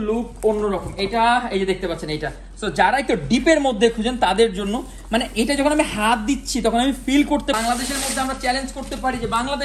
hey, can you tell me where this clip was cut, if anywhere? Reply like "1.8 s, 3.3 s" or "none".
7.6 s